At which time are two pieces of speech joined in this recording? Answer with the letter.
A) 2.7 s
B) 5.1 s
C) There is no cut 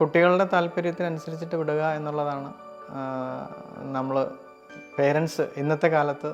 C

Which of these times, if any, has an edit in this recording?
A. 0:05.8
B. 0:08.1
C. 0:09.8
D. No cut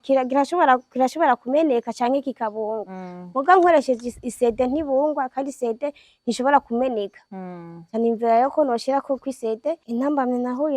C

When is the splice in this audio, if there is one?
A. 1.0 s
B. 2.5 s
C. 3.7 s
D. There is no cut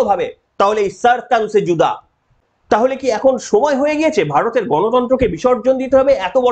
B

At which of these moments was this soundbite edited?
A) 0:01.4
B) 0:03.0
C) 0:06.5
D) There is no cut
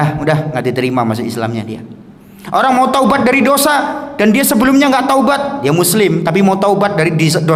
D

